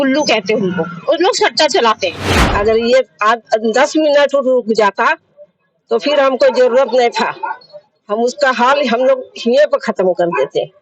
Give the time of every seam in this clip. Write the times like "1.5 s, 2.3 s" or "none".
2.4 s